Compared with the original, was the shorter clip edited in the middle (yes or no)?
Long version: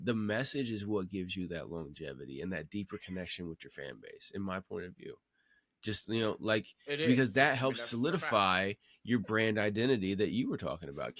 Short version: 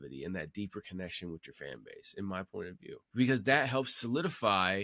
yes